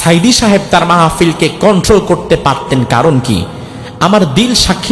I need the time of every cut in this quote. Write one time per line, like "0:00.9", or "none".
none